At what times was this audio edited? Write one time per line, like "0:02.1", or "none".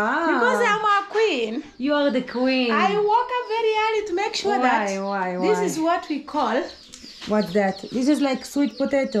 none